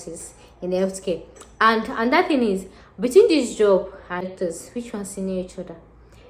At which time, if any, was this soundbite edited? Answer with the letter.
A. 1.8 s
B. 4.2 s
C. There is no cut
B